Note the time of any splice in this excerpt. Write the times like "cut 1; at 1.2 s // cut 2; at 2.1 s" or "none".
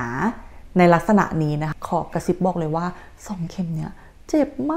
cut 1; at 1.7 s